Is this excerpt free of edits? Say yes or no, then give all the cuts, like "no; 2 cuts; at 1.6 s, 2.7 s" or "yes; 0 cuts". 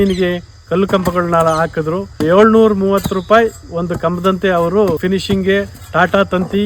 no; 2 cuts; at 2.2 s, 5.0 s